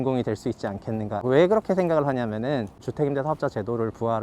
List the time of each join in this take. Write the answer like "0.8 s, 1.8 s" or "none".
1.2 s, 2.8 s